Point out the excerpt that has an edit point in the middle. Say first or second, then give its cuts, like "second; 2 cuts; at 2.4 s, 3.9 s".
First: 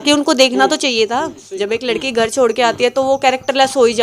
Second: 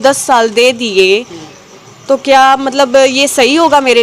first; 1 cut; at 1.4 s